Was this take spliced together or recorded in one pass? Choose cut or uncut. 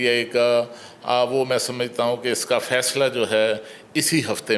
uncut